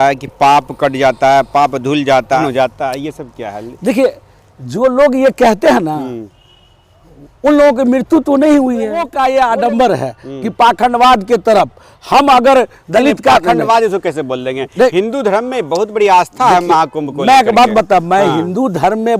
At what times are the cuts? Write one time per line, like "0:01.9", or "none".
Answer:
0:02.4
0:09.0